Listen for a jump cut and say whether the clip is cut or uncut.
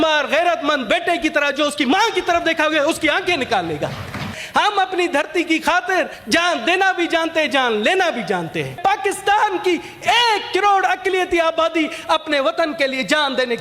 cut